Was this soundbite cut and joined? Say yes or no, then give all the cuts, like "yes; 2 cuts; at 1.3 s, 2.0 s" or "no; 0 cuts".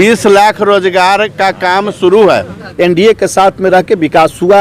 yes; 1 cut; at 2.6 s